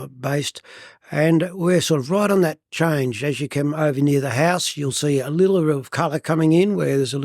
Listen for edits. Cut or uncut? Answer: uncut